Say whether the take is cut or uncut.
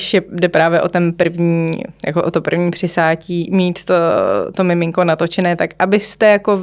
uncut